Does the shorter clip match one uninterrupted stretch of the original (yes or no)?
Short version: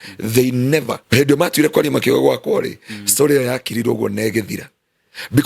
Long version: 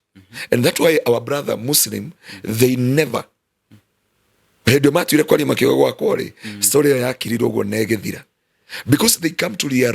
no